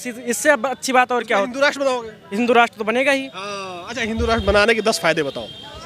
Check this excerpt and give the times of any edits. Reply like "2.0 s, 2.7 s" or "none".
none